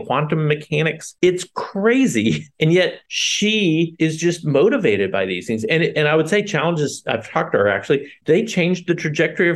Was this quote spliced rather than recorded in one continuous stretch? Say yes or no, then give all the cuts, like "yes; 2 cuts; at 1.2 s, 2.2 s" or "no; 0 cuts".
no; 0 cuts